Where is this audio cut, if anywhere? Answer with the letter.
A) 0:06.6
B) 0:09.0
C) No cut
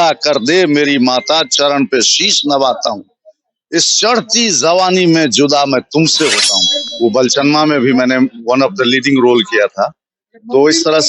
A